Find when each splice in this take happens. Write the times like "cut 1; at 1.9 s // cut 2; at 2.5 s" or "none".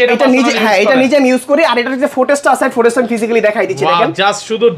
none